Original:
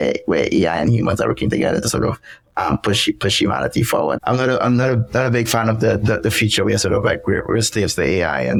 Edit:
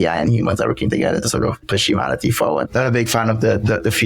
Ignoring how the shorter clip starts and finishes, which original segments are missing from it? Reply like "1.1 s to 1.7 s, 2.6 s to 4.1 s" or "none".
2.3 s to 3.2 s, 4.2 s to 5.1 s